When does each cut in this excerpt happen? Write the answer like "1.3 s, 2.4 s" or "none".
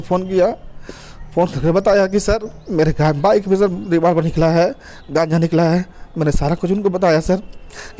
none